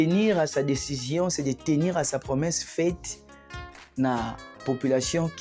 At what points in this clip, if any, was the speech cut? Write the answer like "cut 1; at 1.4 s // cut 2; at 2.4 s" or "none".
none